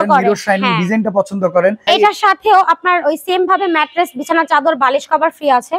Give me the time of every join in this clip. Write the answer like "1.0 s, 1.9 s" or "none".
1.8 s